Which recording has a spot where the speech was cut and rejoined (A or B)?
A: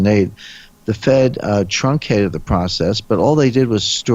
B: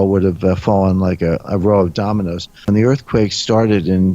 B